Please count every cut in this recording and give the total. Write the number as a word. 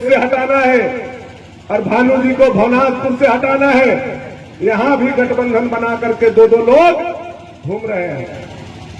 zero